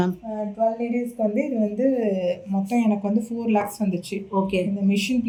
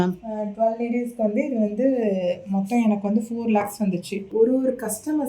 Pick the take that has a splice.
second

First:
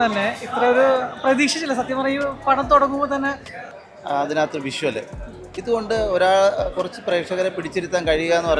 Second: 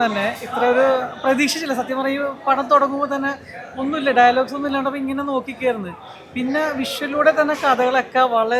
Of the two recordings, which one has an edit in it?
first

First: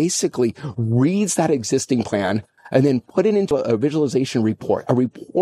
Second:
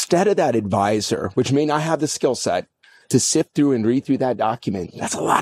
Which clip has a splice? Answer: first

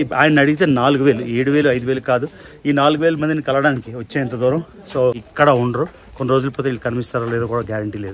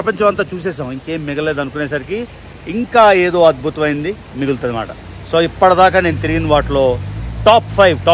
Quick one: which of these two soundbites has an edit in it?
first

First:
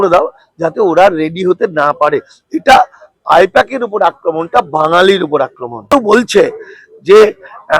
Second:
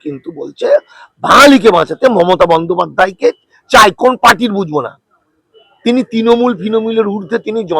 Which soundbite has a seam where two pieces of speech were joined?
first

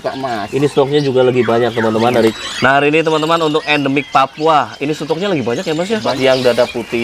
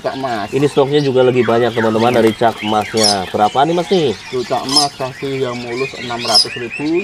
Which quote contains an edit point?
first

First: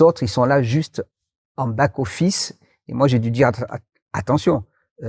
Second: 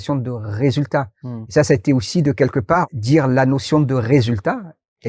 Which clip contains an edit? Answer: second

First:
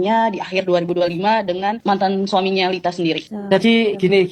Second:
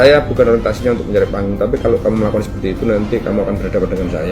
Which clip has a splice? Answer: first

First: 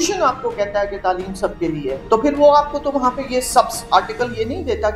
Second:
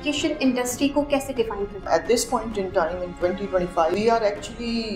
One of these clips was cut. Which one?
second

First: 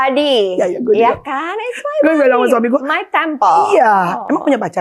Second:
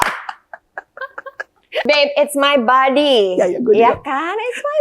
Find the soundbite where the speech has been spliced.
second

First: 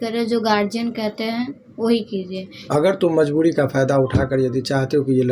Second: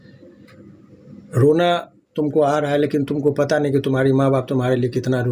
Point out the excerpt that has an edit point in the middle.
first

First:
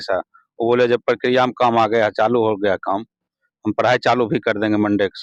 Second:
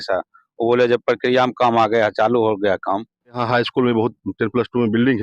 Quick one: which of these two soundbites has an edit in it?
second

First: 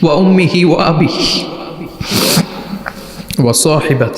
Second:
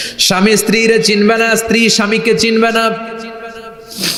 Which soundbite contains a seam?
first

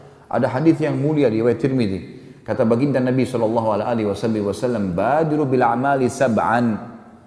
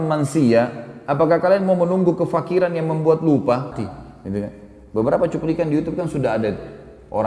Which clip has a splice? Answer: second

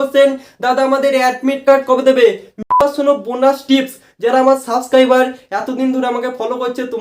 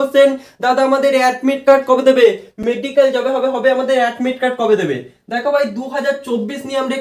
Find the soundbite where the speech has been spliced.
first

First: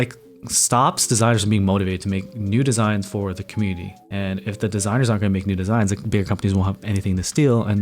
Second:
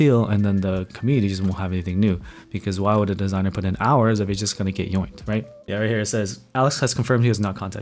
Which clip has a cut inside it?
second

